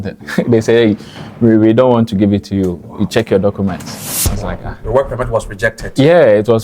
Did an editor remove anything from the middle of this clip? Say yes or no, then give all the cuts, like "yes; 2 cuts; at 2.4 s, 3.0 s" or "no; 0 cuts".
no; 0 cuts